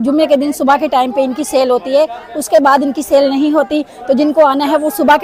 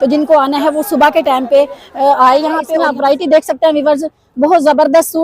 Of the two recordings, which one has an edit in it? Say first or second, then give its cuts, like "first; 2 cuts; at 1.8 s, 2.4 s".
second; 1 cut; at 2.7 s